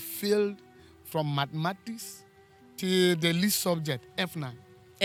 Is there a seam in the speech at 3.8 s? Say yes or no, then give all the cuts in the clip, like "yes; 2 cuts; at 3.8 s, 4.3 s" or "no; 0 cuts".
no; 0 cuts